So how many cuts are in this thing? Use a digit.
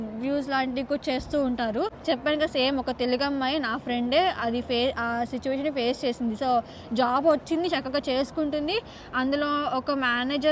1